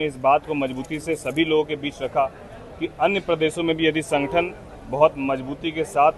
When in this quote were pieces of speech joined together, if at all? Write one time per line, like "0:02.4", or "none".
none